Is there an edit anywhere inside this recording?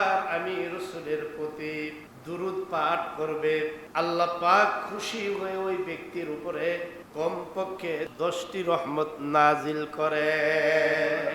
yes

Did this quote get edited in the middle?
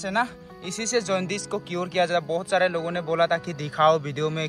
no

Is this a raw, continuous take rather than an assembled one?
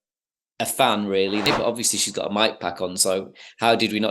no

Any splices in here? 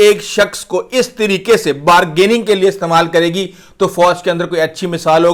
no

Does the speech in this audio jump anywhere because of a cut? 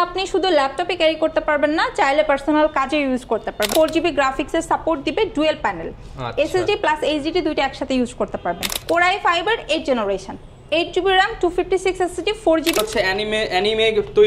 yes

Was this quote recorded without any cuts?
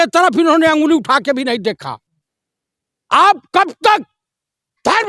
yes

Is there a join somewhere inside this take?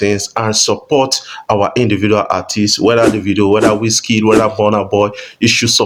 no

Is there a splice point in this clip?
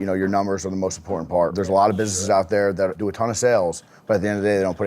yes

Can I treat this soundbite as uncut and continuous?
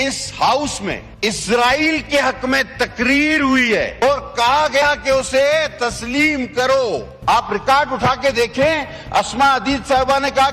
no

